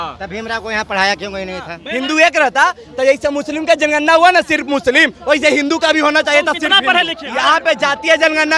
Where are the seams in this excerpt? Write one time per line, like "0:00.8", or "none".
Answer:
0:01.8
0:07.2